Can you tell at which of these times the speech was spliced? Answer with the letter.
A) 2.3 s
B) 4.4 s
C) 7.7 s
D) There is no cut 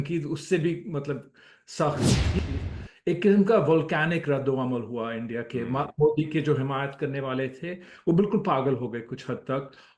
A